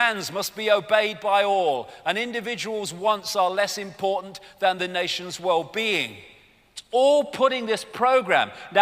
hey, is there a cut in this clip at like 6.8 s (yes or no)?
no